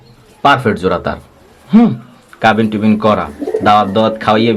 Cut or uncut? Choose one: uncut